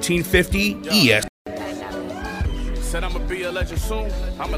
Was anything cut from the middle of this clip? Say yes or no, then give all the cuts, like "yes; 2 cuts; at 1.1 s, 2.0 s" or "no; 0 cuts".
yes; 1 cut; at 1.3 s